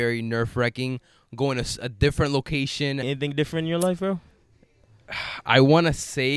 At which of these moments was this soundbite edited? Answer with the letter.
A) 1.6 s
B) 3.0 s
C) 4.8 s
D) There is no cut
B